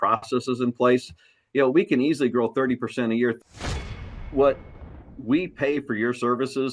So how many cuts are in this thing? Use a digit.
1